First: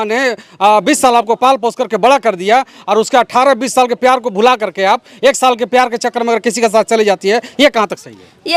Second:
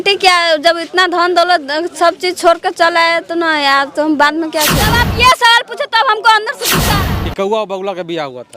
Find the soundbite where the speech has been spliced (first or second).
second